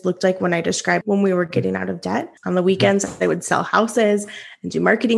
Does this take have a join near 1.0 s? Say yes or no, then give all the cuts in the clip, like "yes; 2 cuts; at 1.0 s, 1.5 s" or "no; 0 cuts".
yes; 2 cuts; at 1.0 s, 2.3 s